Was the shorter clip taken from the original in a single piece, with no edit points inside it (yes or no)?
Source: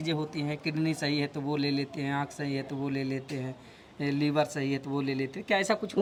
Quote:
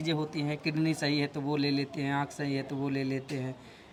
yes